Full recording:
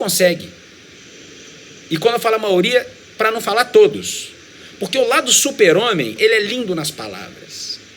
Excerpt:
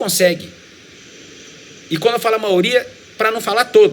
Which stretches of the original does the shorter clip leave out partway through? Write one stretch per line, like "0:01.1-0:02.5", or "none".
none